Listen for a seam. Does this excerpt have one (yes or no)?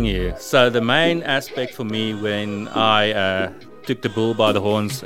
no